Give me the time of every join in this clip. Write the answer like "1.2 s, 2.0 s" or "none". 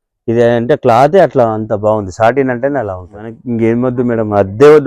3.4 s